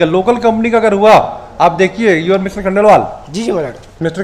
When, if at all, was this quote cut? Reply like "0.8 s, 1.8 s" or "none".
none